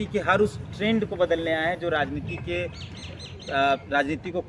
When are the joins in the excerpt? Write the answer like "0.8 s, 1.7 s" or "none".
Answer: none